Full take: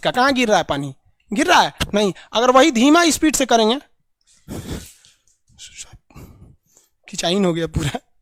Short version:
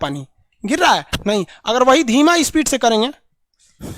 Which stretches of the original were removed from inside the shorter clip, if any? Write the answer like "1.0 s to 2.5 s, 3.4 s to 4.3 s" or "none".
none